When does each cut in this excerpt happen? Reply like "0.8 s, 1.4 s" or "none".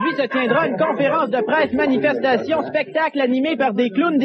none